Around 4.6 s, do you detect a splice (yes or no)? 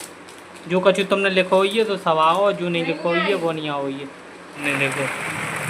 yes